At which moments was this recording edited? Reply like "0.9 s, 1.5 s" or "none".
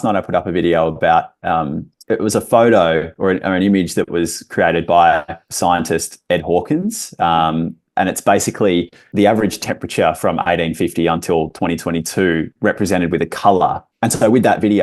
13.9 s